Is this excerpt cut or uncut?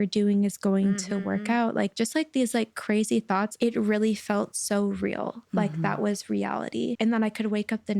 cut